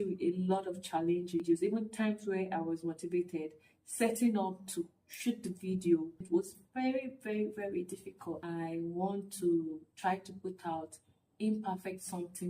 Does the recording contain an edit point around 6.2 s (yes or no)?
yes